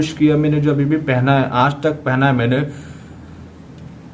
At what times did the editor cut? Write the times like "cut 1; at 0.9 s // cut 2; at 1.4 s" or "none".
none